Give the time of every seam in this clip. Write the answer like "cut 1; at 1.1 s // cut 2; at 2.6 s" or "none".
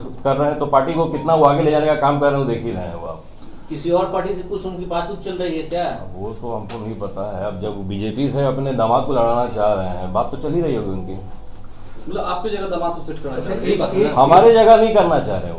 none